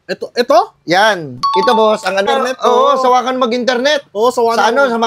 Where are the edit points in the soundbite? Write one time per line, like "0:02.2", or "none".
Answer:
0:02.3